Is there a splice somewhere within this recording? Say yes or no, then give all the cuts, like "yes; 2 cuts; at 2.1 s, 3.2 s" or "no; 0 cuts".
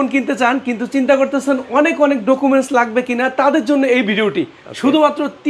no; 0 cuts